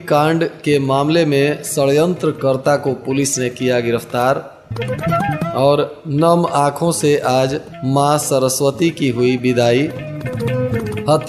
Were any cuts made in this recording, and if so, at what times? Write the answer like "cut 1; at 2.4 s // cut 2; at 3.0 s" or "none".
none